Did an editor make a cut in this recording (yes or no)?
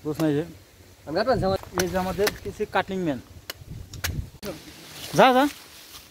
yes